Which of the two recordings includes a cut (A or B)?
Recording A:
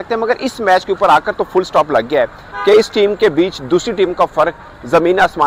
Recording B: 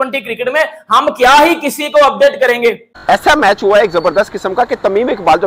B